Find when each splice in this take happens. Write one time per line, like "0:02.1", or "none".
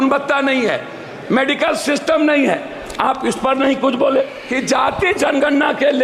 0:04.4